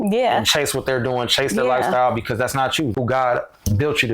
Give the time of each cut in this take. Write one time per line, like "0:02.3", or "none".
0:02.9